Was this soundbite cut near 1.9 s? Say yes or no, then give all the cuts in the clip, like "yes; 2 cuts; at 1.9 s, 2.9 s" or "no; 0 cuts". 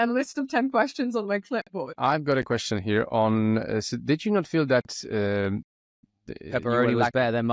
yes; 1 cut; at 1.9 s